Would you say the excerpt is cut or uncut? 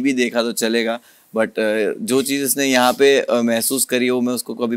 uncut